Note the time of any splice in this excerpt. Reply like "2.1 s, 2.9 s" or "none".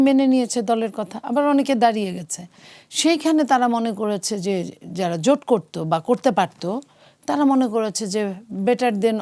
none